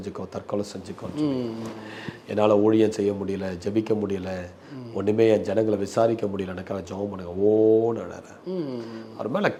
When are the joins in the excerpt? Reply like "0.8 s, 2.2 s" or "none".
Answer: none

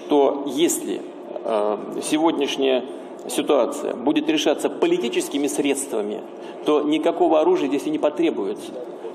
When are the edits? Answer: 5.7 s

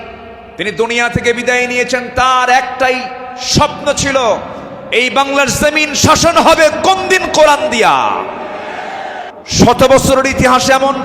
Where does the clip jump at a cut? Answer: 9.2 s

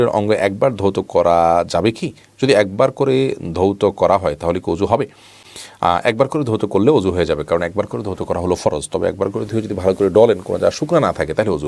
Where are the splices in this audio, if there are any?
none

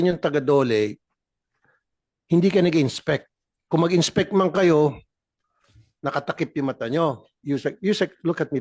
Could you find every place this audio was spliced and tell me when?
7.4 s

